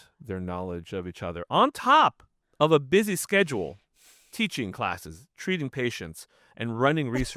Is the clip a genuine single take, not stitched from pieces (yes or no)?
yes